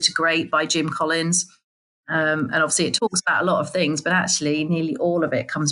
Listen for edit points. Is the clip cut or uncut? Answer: uncut